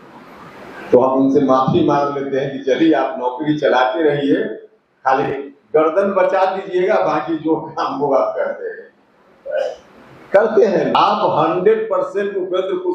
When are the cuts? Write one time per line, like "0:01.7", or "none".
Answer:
0:11.0